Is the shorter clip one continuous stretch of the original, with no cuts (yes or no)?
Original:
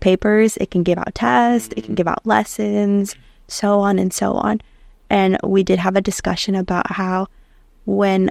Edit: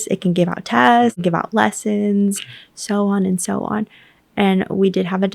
no